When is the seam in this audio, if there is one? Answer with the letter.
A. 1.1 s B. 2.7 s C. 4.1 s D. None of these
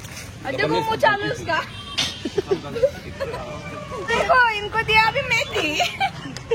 C